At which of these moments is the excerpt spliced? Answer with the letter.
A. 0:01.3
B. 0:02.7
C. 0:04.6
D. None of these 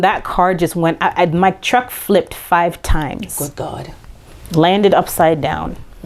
D